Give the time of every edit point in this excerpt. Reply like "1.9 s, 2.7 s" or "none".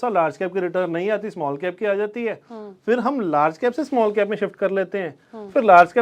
none